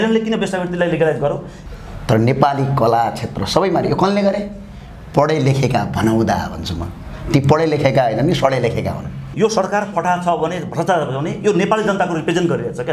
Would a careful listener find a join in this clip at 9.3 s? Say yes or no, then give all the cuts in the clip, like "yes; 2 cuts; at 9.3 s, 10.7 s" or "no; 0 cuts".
yes; 2 cuts; at 1.5 s, 9.3 s